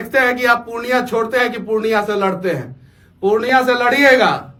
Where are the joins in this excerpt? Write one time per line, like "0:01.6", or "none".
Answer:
none